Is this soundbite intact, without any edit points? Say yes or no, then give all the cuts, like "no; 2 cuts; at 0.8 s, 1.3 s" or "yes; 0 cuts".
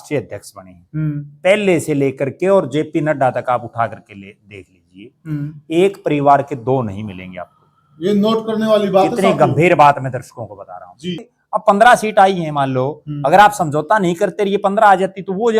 no; 1 cut; at 11.2 s